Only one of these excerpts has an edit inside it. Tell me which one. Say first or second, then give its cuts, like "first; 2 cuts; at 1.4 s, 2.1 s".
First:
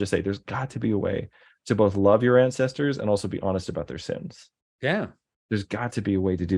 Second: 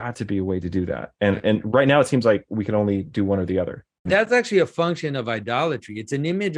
second; 1 cut; at 4.1 s